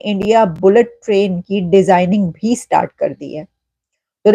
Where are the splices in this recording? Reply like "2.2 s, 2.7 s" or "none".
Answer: none

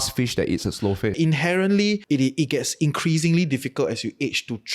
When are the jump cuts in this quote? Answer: 1.1 s, 2.0 s

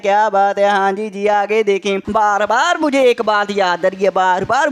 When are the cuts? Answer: 2.0 s

